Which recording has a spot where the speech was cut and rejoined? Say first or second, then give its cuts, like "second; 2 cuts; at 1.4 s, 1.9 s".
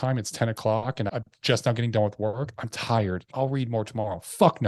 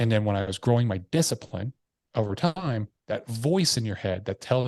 first; 2 cuts; at 1.1 s, 3.3 s